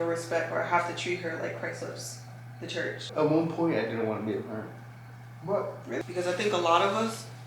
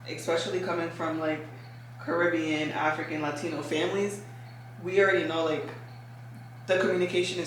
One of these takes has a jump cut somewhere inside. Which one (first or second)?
first